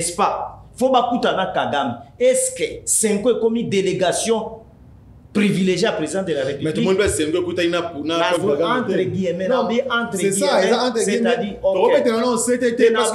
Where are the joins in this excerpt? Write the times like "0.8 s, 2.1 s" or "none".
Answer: none